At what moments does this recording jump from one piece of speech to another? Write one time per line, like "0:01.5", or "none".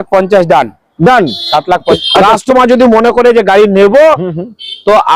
0:01.9